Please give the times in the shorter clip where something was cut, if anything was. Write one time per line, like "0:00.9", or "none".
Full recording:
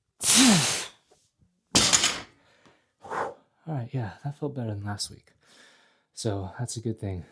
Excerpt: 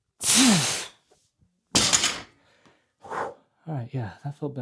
none